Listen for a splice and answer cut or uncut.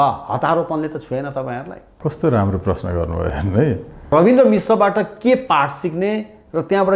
cut